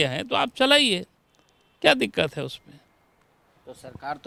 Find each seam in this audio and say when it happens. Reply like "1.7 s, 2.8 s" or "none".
none